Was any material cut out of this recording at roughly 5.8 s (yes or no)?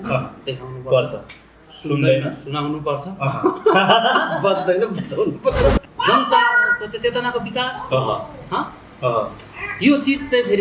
yes